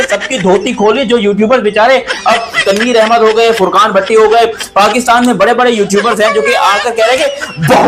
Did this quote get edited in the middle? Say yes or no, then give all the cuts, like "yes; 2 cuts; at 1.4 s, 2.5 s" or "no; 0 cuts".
no; 0 cuts